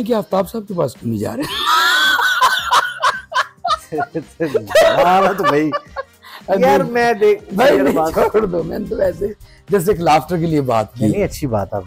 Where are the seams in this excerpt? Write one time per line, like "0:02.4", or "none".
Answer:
none